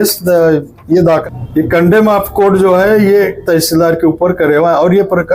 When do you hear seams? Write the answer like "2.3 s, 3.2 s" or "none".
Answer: 1.2 s